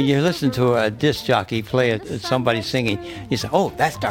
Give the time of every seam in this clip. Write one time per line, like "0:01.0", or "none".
0:02.1